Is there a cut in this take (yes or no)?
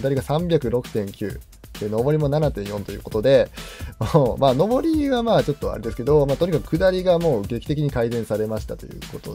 no